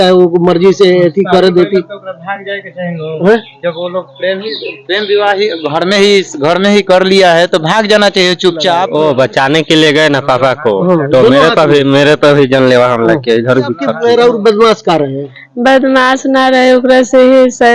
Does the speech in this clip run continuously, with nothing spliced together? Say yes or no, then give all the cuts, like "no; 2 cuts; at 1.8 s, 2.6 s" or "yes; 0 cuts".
no; 2 cuts; at 8.9 s, 13.9 s